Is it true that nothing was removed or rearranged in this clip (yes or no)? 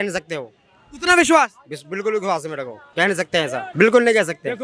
no